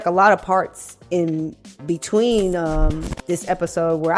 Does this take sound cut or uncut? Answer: uncut